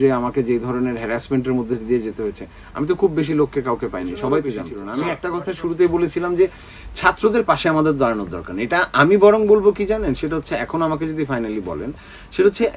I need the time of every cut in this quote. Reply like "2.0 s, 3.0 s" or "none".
4.8 s